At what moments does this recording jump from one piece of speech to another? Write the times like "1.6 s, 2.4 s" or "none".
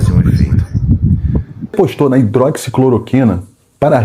1.7 s

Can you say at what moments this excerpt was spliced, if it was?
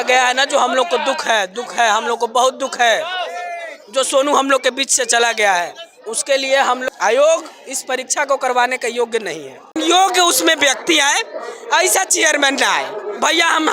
6.8 s, 9.7 s

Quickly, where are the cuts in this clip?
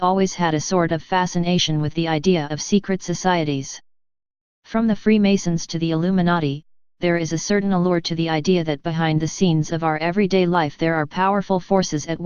8.8 s

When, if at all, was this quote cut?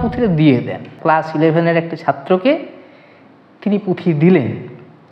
0.9 s

